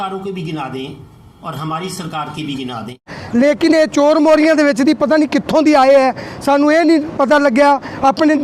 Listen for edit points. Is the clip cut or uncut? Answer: cut